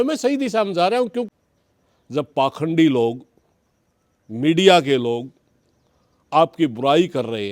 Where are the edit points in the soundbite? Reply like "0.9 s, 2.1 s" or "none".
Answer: 1.3 s